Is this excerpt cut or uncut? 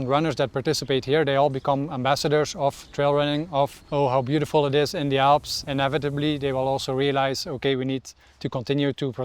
cut